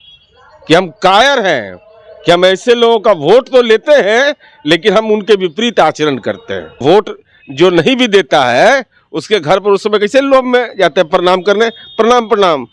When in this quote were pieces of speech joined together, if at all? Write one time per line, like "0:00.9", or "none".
0:06.8